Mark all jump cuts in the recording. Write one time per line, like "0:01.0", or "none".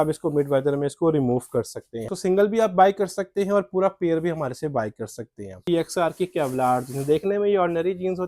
0:02.1
0:05.6